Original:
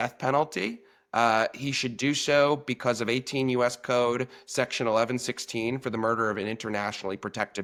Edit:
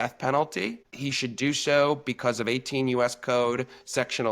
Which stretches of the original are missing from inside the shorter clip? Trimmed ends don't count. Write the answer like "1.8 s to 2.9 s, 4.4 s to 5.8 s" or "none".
1.0 s to 1.6 s